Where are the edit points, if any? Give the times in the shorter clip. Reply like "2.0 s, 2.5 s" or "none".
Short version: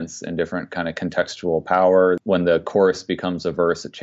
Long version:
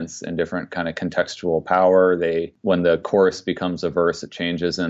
2.2 s